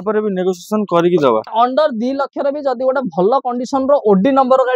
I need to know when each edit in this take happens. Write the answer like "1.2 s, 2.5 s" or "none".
1.5 s